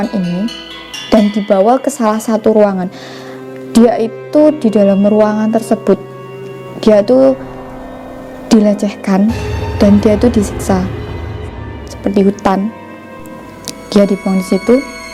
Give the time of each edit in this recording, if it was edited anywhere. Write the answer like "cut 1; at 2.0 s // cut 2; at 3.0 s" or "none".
cut 1; at 11.4 s